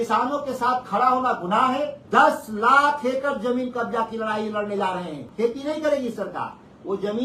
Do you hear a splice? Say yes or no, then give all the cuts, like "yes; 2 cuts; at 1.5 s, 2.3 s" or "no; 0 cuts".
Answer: yes; 2 cuts; at 2.0 s, 5.3 s